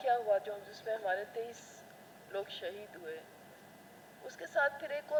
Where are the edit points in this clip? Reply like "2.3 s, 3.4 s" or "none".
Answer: none